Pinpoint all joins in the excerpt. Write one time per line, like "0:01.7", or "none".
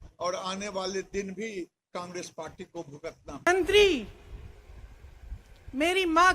0:03.5